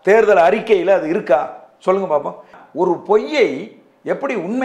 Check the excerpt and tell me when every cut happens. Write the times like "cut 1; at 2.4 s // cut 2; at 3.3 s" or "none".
cut 1; at 2.6 s